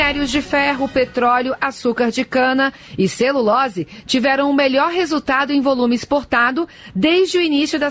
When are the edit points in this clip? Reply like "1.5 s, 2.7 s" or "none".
none